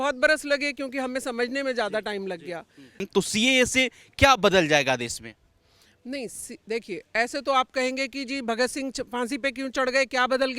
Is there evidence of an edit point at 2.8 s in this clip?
yes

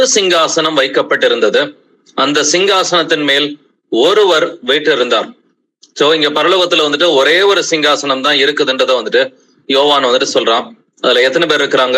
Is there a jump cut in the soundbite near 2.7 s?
no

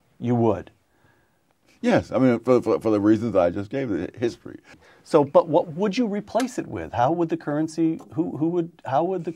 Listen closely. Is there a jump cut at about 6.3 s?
no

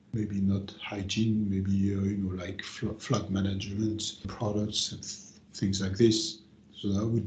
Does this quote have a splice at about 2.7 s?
no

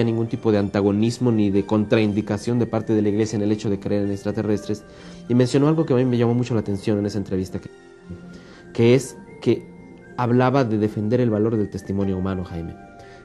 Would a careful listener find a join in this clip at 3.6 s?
no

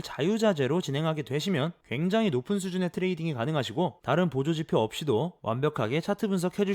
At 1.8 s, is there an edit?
yes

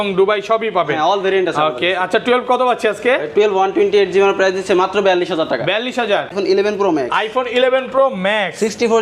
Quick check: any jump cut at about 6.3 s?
yes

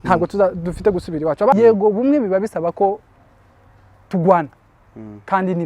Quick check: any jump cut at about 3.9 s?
no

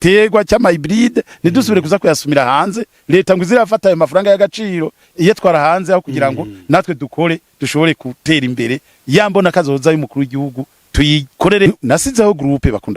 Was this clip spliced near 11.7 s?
yes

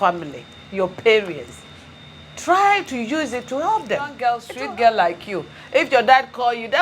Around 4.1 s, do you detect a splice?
yes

